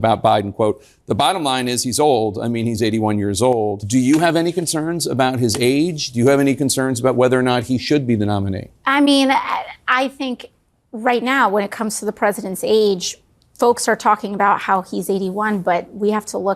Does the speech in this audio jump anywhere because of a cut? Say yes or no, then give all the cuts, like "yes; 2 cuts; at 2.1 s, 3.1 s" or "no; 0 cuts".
yes; 1 cut; at 3.8 s